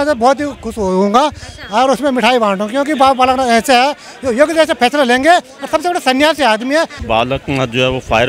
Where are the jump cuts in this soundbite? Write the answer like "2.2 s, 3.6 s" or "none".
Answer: 7.0 s